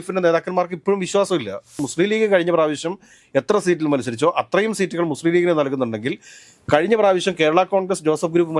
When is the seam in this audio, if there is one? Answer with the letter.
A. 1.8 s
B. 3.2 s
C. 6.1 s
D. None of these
A